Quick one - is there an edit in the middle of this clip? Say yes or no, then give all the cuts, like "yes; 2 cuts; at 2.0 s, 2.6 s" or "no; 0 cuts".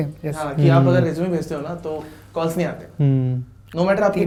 no; 0 cuts